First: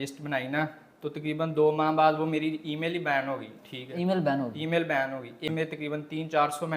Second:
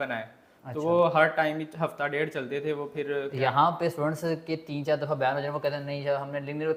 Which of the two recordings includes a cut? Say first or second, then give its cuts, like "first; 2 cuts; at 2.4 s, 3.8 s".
first; 1 cut; at 5.5 s